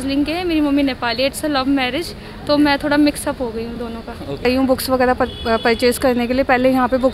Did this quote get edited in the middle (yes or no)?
yes